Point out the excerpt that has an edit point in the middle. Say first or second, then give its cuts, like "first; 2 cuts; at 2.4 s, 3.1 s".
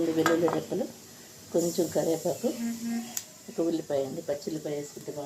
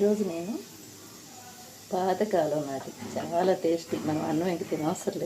second; 1 cut; at 3.2 s